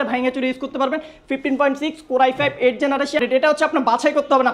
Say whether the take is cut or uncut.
cut